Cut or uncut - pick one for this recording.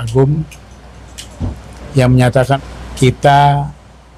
cut